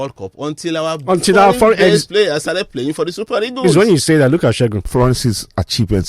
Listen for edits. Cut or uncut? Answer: cut